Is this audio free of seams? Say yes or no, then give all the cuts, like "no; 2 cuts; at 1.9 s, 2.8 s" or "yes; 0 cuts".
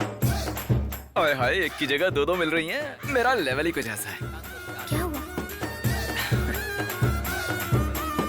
yes; 0 cuts